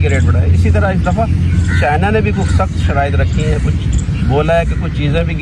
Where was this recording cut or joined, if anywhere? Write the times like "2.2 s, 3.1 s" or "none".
none